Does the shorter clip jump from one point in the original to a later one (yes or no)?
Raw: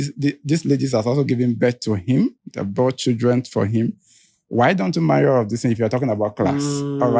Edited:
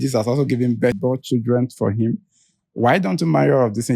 yes